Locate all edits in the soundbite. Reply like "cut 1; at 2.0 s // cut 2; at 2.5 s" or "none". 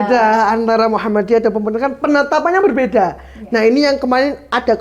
none